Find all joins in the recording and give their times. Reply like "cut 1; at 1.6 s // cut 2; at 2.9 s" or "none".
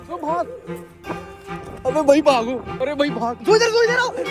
none